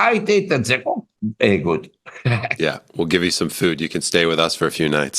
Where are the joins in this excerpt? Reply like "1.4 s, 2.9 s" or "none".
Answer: 1.2 s